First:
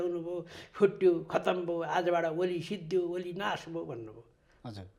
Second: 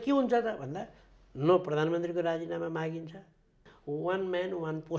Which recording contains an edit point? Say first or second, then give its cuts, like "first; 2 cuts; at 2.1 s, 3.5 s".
second; 1 cut; at 3.7 s